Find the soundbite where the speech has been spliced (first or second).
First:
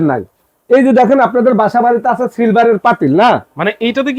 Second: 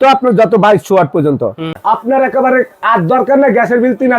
second